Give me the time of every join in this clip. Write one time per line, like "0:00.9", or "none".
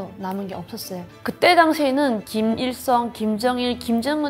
0:01.1